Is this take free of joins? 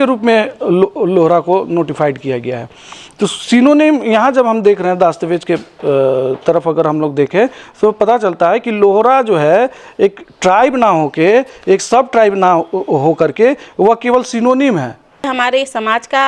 no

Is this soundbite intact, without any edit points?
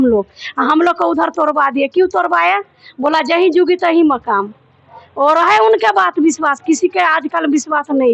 yes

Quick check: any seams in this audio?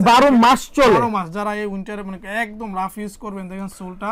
no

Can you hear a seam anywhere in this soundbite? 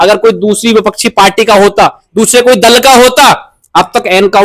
no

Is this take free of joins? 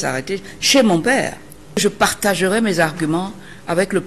no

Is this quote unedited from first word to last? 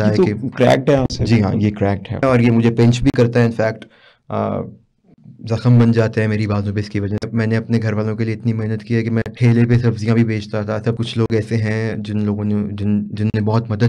no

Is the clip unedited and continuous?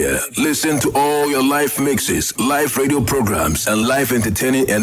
yes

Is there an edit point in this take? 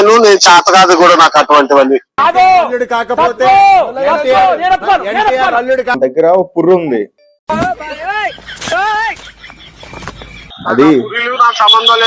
yes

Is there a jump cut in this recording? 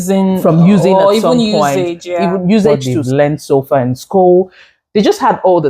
yes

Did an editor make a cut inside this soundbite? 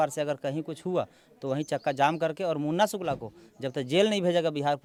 no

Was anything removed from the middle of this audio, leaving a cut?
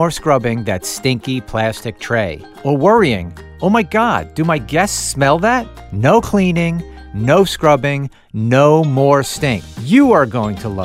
yes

